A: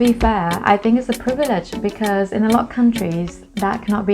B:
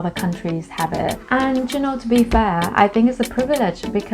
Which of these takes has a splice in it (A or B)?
B